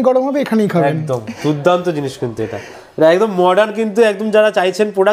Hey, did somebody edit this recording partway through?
no; 0 cuts

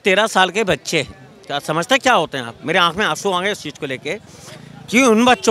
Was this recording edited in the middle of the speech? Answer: no; 0 cuts

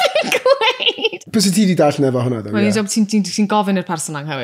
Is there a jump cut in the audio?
yes; 1 cut; at 1.2 s

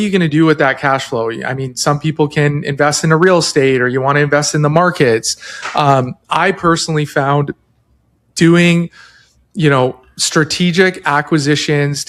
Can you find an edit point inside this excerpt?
no; 0 cuts

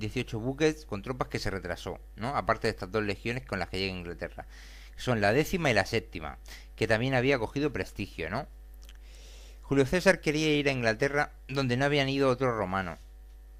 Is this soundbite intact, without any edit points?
no; 1 cut; at 5.2 s

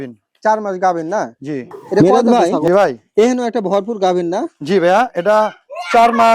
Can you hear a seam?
yes; 1 cut; at 2.0 s

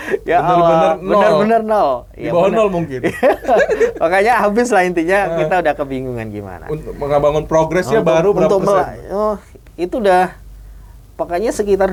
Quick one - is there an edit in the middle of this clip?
no; 0 cuts

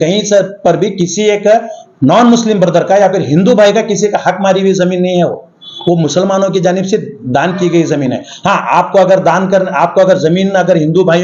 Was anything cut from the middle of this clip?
no; 0 cuts

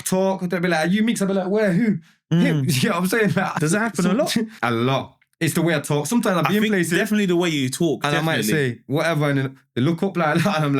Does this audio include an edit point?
yes; 2 cuts; at 3.6 s, 4.6 s

